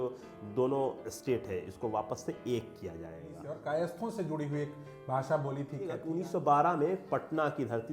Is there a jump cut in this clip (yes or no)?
yes